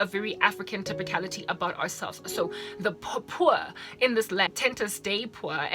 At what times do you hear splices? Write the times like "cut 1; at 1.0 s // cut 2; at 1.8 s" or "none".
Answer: cut 1; at 4.5 s